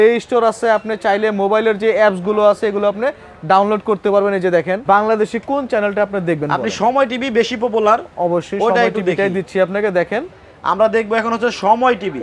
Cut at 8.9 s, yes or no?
no